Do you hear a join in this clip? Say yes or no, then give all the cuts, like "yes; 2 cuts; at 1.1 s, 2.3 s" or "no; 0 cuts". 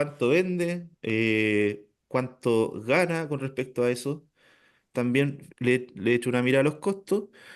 no; 0 cuts